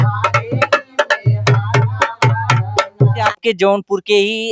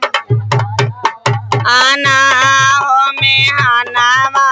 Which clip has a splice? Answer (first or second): first